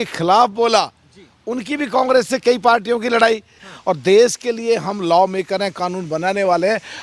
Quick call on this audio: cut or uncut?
cut